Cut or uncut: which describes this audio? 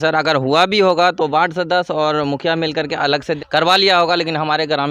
cut